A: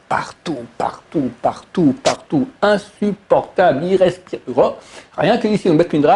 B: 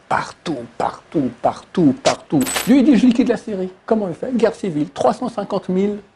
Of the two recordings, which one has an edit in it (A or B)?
B